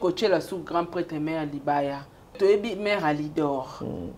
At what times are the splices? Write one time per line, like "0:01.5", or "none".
0:02.3